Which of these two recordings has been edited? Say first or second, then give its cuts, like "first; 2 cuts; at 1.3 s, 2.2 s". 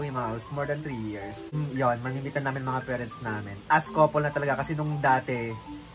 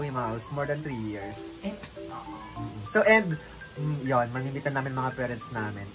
first; 1 cut; at 1.4 s